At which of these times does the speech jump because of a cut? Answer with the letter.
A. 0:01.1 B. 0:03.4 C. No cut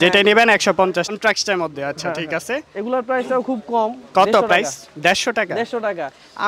A